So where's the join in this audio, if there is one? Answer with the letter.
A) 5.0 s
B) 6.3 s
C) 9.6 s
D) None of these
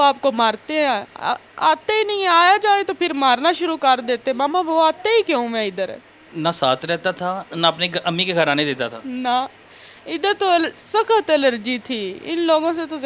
B